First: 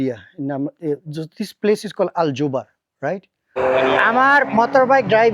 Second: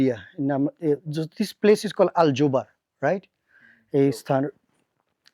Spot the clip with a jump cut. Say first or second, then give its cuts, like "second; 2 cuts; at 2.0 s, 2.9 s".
first; 1 cut; at 3.6 s